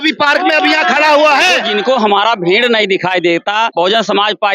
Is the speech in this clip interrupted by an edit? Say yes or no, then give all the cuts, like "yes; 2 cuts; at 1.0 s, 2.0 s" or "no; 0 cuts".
yes; 2 cuts; at 1.7 s, 3.7 s